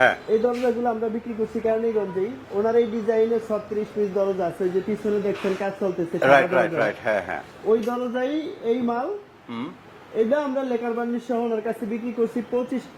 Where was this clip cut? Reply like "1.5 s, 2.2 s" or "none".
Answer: none